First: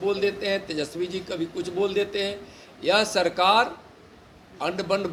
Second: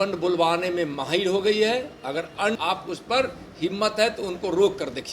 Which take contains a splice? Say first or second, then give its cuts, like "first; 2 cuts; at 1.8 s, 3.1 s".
second; 1 cut; at 2.6 s